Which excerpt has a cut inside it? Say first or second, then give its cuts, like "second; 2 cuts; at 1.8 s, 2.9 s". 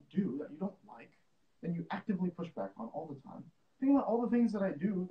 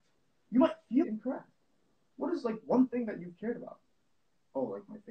second; 1 cut; at 1.0 s